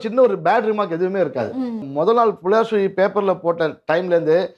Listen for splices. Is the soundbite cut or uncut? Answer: cut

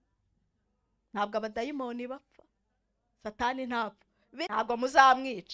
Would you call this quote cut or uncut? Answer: cut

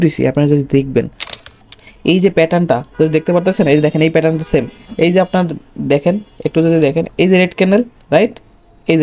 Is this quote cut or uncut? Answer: cut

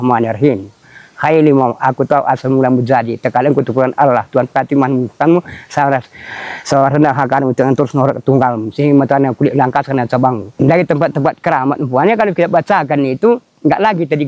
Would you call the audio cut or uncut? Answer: cut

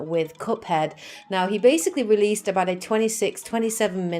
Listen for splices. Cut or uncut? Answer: uncut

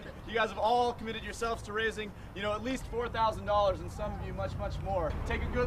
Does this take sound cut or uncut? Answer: cut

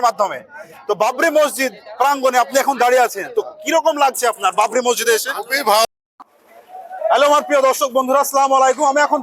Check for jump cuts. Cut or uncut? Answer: cut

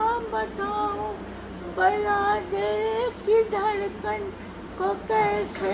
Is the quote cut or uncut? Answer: uncut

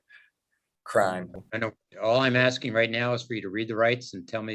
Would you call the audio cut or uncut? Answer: uncut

